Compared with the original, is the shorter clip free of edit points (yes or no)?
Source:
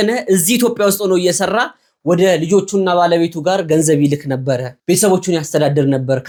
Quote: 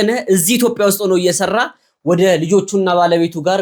yes